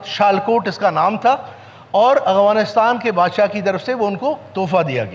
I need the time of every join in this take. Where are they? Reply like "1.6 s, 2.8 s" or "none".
none